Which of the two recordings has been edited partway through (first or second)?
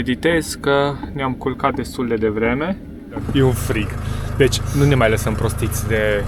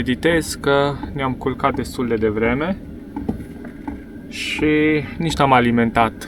first